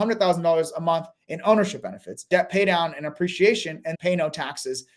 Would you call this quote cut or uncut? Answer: cut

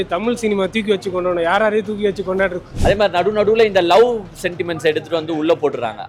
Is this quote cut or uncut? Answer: cut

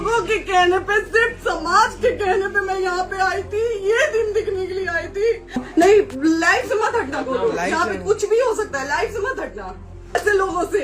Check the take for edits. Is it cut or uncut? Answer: cut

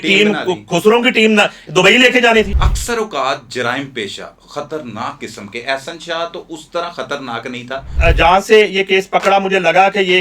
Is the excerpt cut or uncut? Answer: cut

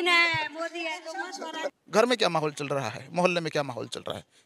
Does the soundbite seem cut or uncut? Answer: uncut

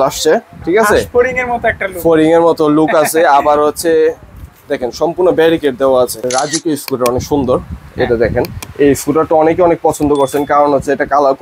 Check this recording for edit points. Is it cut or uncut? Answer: cut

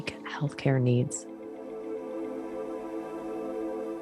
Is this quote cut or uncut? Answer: cut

